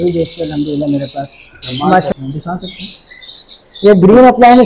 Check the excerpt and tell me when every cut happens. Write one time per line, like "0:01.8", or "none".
0:02.1